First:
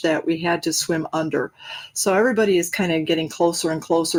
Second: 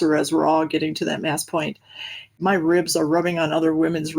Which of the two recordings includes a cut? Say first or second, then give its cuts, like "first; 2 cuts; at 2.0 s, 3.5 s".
second; 1 cut; at 2.4 s